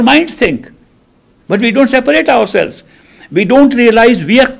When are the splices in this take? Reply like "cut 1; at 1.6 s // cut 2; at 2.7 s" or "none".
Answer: none